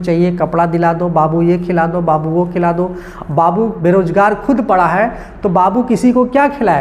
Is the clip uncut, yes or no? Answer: yes